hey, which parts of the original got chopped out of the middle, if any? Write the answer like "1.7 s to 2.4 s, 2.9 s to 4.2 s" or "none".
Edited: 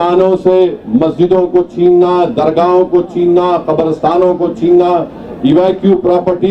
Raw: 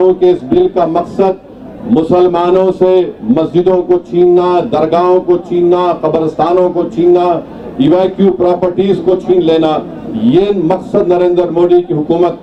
none